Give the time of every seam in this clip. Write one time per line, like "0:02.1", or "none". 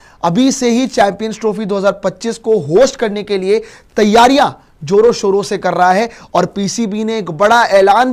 none